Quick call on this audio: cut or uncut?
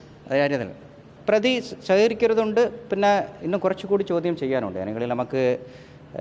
cut